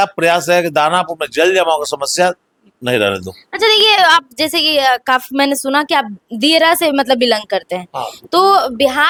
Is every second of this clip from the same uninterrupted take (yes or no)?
yes